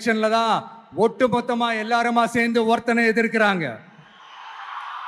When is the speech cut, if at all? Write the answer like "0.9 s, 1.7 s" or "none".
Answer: none